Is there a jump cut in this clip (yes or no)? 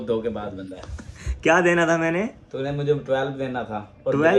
no